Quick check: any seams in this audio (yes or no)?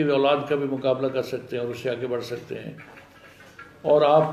no